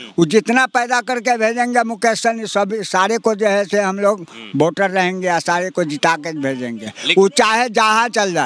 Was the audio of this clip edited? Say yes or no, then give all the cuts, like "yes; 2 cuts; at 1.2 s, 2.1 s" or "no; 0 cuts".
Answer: no; 0 cuts